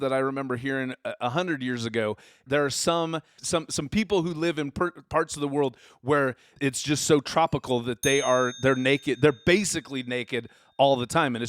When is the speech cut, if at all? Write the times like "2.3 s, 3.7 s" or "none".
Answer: 2.4 s, 3.4 s, 6.5 s